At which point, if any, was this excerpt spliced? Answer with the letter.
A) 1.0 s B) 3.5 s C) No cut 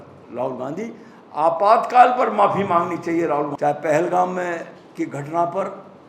B